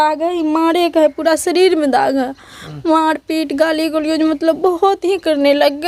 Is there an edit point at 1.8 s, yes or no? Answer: no